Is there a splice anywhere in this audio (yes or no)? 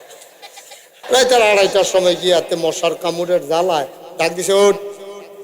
yes